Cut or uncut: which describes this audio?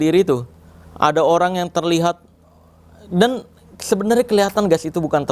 uncut